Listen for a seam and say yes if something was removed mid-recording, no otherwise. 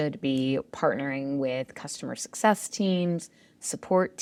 no